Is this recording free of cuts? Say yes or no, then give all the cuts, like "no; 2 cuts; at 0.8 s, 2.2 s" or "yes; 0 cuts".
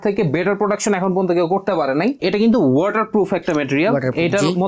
no; 1 cut; at 2.2 s